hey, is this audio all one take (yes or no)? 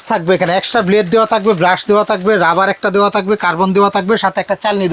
yes